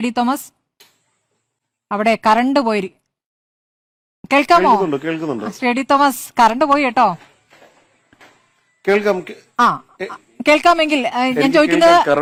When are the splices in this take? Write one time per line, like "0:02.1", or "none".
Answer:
none